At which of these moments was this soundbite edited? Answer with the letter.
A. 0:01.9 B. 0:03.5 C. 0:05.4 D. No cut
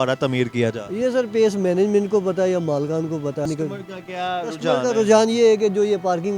B